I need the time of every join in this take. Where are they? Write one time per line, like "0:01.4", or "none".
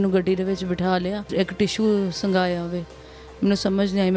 0:01.3